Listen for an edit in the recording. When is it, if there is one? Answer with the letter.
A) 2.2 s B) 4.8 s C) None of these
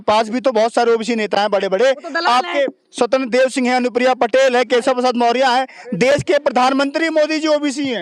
C